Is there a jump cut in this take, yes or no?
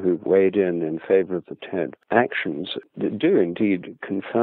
yes